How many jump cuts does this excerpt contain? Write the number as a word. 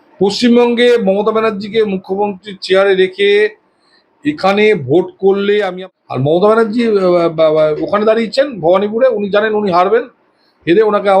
one